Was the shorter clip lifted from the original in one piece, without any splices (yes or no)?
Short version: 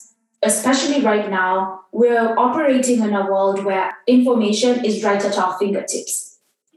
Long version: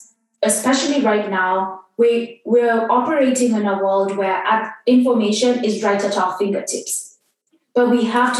no